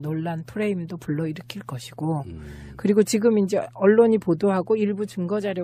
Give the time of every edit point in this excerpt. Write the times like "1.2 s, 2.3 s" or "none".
3.9 s